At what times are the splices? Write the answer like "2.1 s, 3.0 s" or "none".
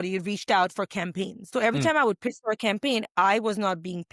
1.4 s